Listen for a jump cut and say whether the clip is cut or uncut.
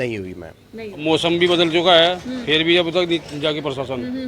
cut